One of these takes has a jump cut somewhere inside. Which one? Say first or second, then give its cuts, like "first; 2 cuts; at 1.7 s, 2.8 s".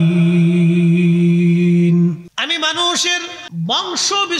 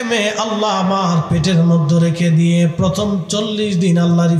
first; 2 cuts; at 2.3 s, 3.4 s